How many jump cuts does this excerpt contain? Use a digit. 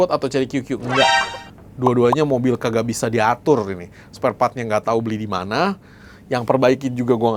0